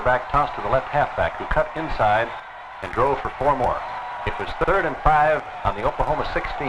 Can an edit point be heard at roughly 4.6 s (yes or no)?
yes